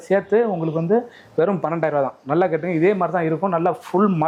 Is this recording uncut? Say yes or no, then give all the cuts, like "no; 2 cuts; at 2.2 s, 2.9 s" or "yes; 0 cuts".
yes; 0 cuts